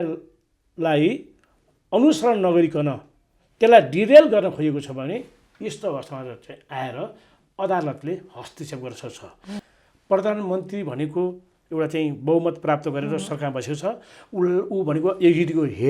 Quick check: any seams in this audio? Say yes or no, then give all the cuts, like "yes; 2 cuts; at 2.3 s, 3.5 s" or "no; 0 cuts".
yes; 1 cut; at 9.6 s